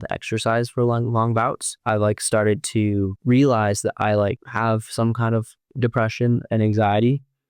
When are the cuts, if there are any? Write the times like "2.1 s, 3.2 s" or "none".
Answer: 1.7 s, 3.2 s, 4.5 s, 5.6 s